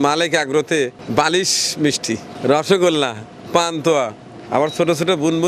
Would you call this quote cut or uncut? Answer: uncut